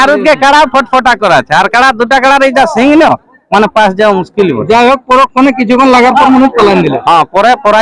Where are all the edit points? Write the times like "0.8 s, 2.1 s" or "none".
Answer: none